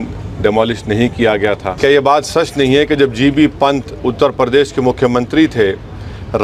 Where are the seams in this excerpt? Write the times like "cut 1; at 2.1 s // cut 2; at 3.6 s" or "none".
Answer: cut 1; at 1.7 s